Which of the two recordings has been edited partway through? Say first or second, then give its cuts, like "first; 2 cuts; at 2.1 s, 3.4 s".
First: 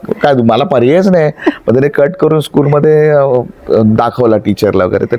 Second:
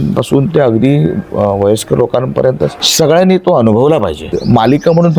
second; 2 cuts; at 2.8 s, 4.3 s